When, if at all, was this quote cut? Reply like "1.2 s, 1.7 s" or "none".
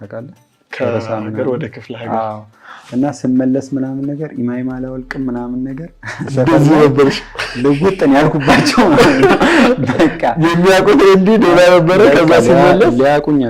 none

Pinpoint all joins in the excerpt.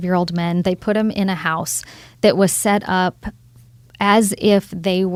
none

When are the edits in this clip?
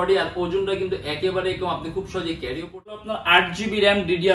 3.0 s

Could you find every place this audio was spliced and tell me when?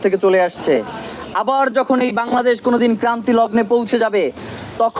none

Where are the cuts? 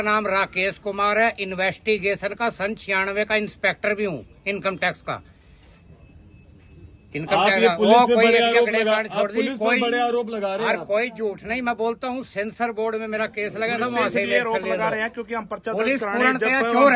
none

